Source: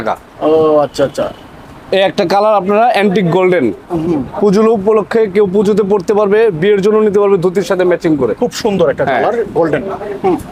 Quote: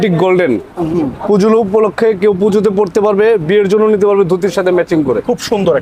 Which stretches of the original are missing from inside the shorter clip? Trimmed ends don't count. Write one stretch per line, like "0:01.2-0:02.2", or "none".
none